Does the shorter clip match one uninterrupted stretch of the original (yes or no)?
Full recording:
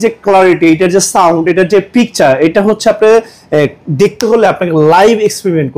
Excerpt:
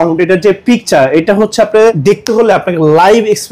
no